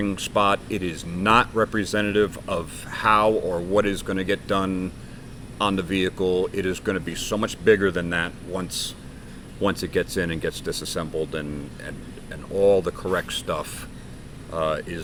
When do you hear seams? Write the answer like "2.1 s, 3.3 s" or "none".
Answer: none